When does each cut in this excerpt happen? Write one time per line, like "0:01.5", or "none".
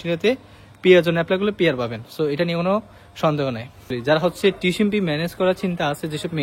0:04.0